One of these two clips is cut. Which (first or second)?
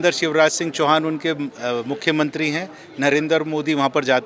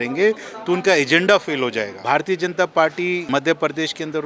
second